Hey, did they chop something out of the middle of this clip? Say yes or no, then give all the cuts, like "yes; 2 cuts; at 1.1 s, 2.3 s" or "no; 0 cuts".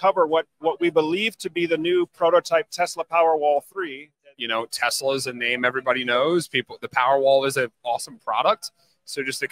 yes; 1 cut; at 4.0 s